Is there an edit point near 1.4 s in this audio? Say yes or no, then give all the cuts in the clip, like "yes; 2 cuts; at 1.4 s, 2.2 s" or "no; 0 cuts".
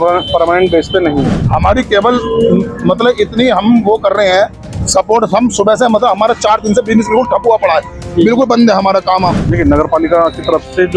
yes; 2 cuts; at 1.4 s, 9.5 s